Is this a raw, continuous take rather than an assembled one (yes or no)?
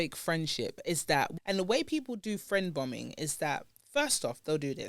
no